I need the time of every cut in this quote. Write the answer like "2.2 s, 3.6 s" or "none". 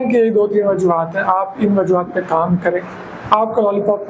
none